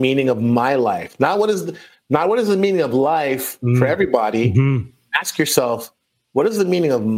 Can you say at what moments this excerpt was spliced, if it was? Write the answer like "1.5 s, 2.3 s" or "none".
none